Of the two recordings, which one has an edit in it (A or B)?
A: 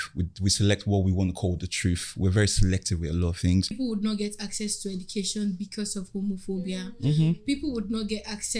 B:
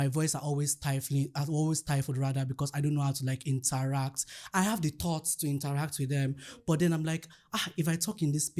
A